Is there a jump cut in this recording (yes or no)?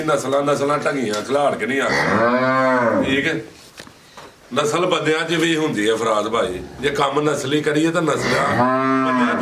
no